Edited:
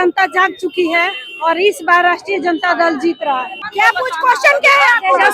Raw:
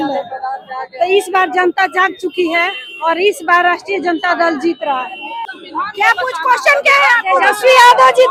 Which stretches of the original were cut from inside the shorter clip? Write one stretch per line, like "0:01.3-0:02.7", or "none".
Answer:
0:05.2-0:05.8